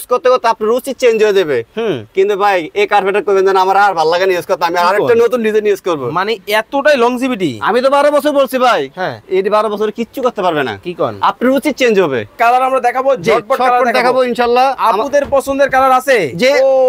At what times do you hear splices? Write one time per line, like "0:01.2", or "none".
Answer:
0:12.3